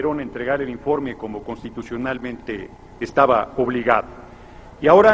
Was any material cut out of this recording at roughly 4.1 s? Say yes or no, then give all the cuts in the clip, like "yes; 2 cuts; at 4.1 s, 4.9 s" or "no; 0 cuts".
yes; 1 cut; at 4.1 s